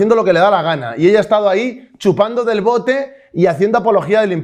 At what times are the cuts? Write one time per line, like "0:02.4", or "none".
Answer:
none